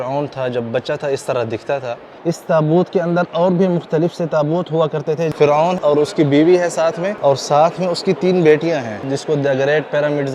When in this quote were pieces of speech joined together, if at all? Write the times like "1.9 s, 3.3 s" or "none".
2.1 s, 5.7 s, 7.1 s, 9.1 s